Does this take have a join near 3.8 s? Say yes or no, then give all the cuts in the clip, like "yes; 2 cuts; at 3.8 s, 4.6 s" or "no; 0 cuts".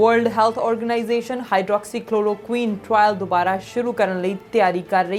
no; 0 cuts